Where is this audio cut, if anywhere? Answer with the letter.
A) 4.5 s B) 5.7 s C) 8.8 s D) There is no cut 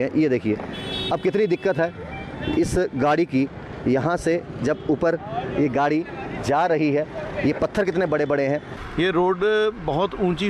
C